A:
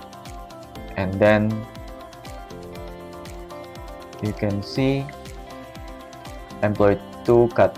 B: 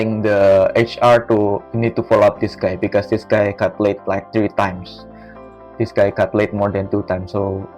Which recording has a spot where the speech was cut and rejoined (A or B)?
A